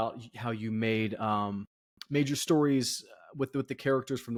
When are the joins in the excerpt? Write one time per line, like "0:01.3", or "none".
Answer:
none